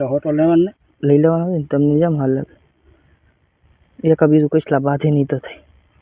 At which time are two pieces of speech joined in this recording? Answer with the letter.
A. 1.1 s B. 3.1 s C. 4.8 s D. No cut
D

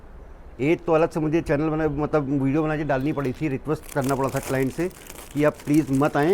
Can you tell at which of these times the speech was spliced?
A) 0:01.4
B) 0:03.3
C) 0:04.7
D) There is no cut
D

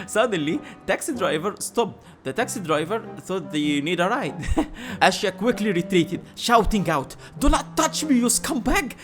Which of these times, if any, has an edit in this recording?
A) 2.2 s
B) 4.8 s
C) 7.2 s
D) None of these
B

